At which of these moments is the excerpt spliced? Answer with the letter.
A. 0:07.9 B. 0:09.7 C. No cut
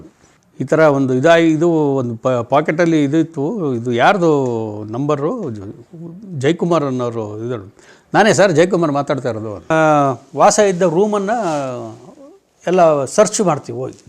B